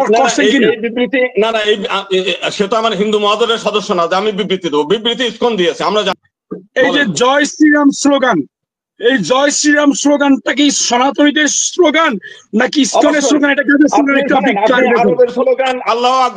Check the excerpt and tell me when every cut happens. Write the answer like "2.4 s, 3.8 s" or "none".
6.2 s